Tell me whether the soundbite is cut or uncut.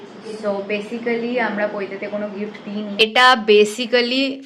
cut